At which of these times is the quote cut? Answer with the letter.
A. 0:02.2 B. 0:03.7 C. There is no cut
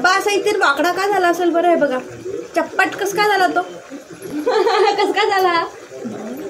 C